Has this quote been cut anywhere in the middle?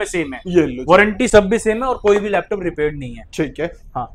no; 0 cuts

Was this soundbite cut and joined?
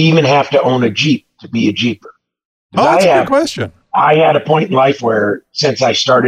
no; 0 cuts

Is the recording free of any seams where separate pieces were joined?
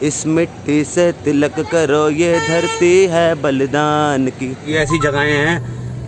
no; 1 cut; at 4.7 s

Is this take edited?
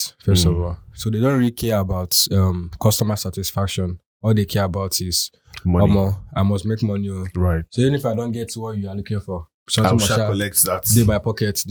no; 0 cuts

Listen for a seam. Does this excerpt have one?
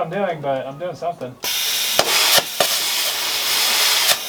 no; 0 cuts

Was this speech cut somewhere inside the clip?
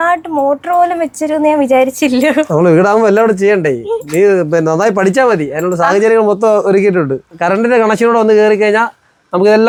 no; 0 cuts

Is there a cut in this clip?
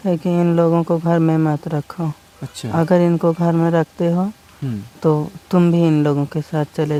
no; 0 cuts

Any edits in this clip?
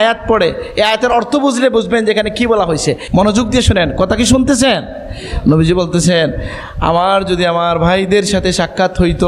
yes; 1 cut; at 3.0 s

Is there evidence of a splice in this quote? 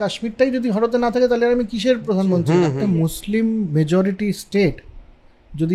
yes; 1 cut; at 2.8 s

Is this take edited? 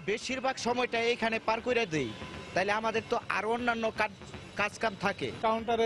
no; 0 cuts

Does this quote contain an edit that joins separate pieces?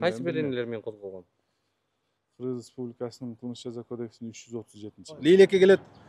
yes; 1 cut; at 5.2 s

